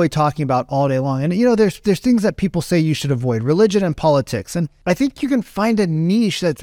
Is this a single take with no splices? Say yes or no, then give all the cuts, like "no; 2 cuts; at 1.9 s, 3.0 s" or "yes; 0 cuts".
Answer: no; 1 cut; at 4.7 s